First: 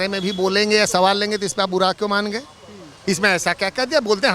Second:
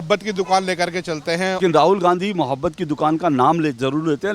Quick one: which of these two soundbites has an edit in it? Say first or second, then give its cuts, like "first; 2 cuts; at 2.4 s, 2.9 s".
second; 1 cut; at 1.6 s